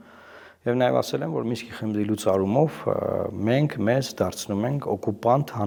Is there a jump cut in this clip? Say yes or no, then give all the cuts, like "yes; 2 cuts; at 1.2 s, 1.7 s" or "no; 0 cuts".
no; 0 cuts